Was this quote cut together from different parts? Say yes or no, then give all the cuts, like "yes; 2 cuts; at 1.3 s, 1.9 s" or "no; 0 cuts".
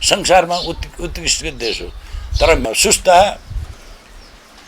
yes; 1 cut; at 2.6 s